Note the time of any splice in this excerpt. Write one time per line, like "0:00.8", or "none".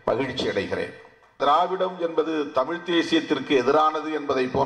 0:01.4